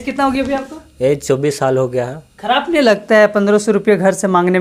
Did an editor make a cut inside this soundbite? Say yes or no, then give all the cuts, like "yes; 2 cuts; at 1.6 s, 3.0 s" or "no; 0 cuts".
no; 0 cuts